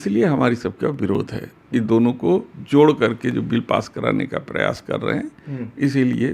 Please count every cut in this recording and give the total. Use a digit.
0